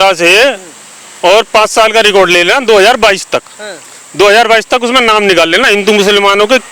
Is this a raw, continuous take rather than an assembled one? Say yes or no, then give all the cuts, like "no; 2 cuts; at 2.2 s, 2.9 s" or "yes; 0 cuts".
yes; 0 cuts